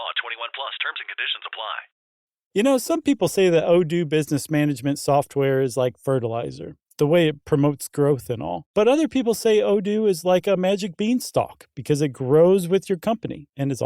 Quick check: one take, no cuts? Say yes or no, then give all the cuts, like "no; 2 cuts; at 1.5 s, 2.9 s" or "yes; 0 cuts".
no; 1 cut; at 2.2 s